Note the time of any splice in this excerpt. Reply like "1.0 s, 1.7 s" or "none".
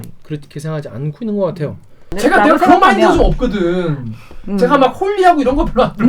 2.1 s